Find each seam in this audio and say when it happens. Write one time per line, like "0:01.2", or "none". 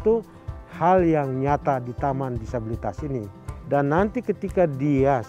none